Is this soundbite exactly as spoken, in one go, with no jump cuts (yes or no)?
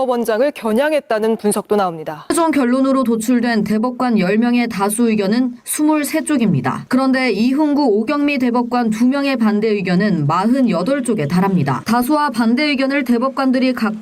no